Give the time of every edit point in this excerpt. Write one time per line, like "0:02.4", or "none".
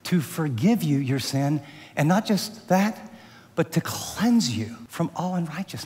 0:04.8